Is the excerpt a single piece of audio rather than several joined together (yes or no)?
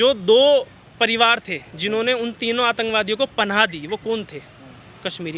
yes